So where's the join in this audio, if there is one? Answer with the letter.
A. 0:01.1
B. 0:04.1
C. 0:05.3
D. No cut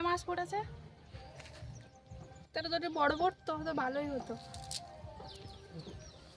C